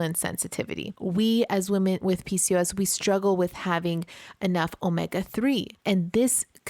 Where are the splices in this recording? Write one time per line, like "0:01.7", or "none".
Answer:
0:00.9
0:02.0
0:05.7